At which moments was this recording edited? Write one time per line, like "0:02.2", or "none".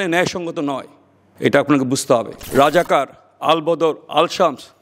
0:02.4

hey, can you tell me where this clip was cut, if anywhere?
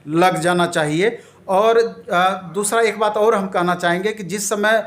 none

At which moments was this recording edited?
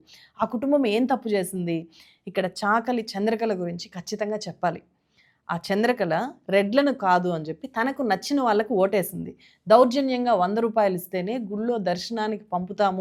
none

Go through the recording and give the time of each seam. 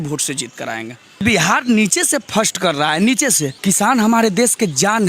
0:01.2
0:03.6

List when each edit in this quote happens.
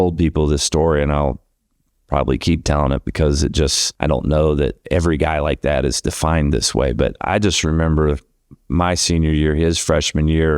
0:03.8
0:04.8

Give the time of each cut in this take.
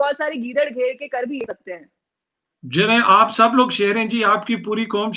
none

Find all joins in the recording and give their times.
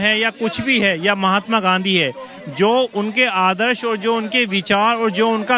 none

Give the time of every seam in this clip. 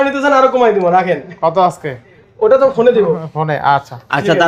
none

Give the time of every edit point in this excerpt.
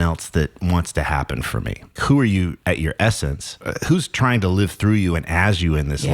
0:02.0
0:02.6
0:03.6

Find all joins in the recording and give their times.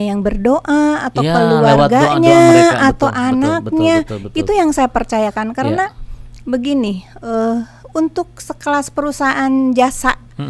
none

